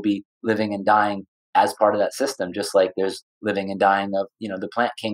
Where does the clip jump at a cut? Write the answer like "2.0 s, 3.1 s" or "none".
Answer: none

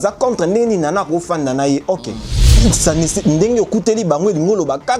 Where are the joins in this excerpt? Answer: 2.4 s

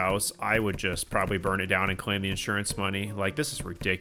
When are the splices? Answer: none

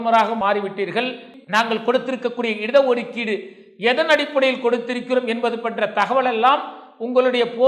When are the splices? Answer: 1.3 s

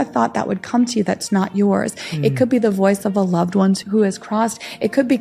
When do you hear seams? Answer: 3.8 s

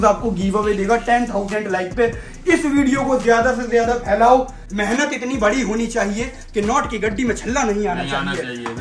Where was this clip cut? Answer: 4.6 s

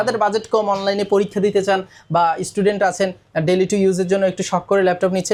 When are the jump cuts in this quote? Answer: none

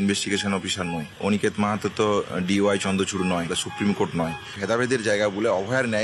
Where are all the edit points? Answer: 4.4 s

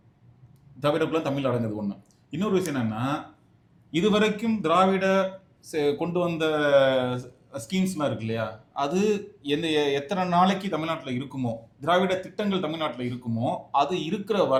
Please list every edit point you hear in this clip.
none

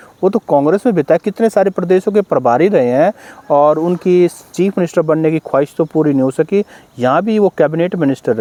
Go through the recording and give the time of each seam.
none

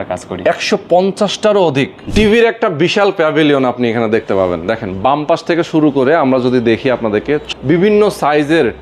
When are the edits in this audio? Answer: 2.0 s, 7.5 s

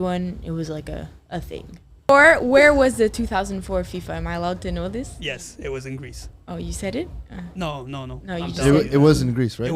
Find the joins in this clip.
2.1 s

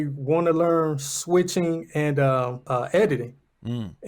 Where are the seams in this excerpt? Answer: 2.6 s

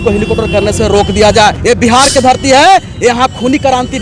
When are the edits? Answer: 1.6 s

